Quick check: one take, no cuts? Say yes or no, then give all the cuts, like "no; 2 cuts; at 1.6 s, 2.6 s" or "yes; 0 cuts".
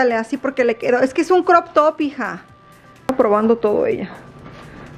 no; 1 cut; at 3.1 s